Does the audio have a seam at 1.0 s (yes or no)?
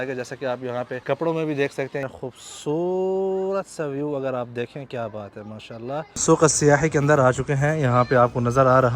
yes